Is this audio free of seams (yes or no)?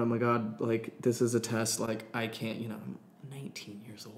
yes